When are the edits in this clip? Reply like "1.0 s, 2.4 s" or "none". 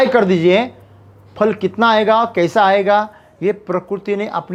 none